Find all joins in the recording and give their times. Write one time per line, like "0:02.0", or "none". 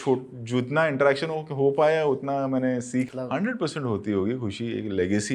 0:03.1